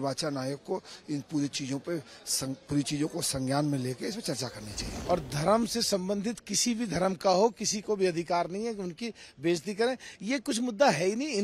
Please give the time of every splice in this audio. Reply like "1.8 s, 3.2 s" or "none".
4.9 s